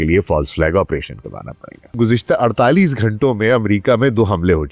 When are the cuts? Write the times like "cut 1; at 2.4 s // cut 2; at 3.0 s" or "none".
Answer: cut 1; at 2.0 s